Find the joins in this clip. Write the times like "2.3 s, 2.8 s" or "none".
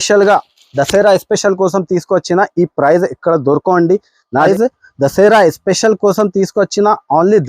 4.5 s